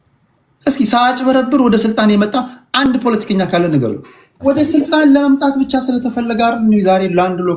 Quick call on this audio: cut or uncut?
cut